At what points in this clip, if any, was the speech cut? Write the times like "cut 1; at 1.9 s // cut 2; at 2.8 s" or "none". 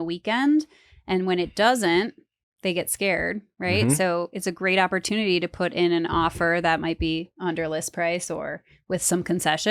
none